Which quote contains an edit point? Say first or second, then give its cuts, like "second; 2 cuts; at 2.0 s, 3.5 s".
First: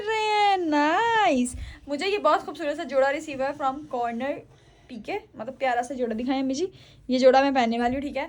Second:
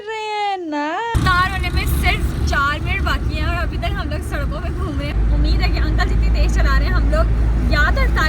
second; 2 cuts; at 1.1 s, 5.2 s